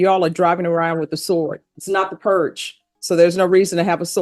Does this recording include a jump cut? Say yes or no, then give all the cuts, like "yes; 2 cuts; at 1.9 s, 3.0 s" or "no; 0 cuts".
yes; 1 cut; at 1.7 s